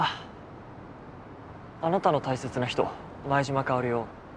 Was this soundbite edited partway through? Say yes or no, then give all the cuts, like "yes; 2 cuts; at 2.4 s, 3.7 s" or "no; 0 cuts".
yes; 1 cut; at 3.1 s